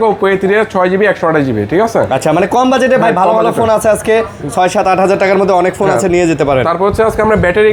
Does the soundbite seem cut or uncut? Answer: uncut